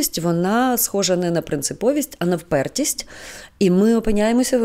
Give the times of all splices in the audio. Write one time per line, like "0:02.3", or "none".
none